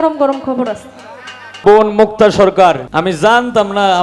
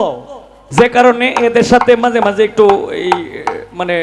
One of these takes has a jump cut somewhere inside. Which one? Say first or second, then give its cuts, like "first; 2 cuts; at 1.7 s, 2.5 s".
first; 2 cuts; at 1.6 s, 2.9 s